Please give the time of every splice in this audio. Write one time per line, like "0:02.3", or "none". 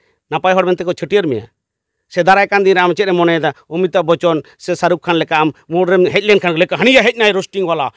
none